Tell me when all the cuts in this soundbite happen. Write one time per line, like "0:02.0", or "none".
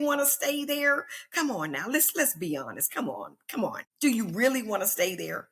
0:03.9